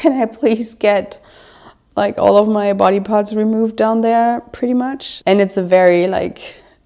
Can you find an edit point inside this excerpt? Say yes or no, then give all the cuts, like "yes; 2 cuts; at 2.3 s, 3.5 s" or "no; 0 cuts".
no; 0 cuts